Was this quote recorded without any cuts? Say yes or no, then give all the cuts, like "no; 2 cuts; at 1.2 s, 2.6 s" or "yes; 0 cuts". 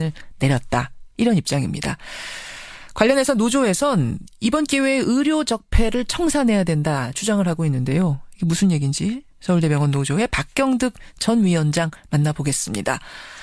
no; 1 cut; at 5.7 s